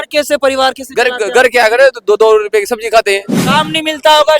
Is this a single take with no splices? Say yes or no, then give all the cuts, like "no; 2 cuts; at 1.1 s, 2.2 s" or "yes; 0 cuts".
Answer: no; 1 cut; at 3.4 s